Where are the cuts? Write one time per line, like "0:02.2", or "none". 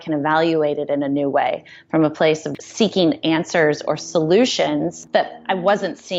0:02.5
0:05.0